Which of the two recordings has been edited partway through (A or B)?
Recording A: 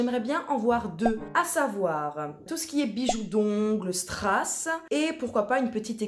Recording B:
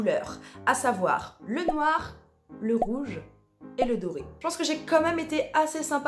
A